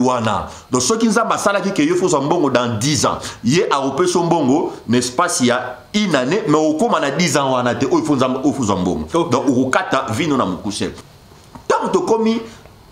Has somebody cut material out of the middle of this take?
yes; 1 cut; at 11.1 s

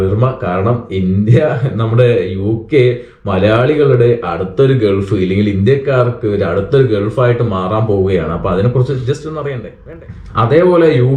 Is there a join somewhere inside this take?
yes; 1 cut; at 9.7 s

